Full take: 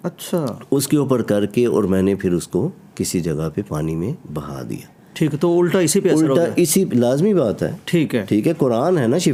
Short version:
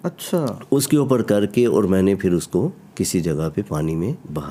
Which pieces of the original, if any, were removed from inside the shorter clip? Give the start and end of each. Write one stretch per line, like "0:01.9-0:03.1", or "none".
none